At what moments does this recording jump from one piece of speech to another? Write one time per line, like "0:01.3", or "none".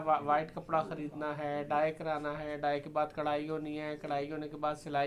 none